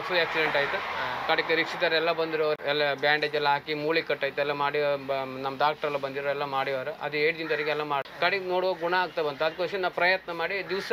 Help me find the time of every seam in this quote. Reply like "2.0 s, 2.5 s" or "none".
2.6 s, 8.0 s